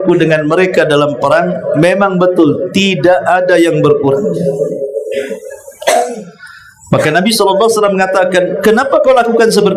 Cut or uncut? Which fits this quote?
uncut